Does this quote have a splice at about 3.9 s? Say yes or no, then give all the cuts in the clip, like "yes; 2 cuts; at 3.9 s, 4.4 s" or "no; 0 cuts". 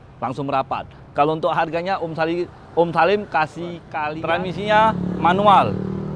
yes; 1 cut; at 3.9 s